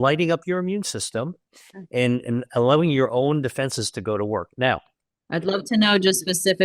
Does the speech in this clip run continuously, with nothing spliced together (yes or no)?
yes